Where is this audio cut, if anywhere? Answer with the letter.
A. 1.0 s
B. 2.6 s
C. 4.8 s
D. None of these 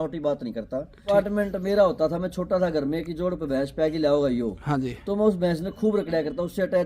A